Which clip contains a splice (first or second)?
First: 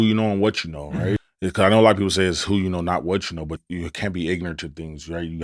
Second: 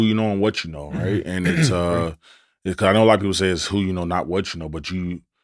first